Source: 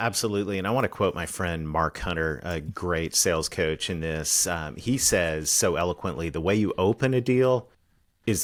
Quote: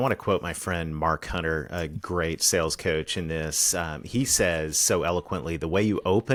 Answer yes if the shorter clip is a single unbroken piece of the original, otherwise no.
yes